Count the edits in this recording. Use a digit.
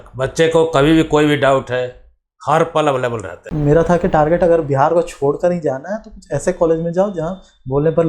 1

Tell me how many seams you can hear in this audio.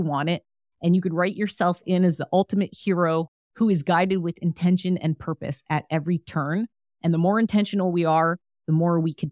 1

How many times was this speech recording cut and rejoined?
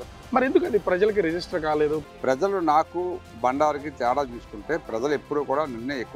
2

